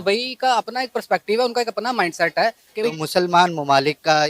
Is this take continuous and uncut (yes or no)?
no